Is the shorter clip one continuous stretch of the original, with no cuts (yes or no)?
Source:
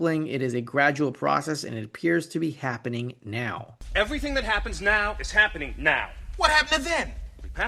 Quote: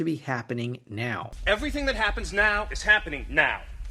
no